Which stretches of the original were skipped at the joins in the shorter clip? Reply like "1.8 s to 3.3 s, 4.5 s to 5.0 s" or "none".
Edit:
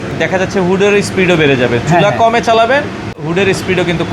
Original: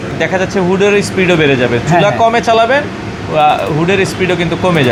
3.2 s to 3.7 s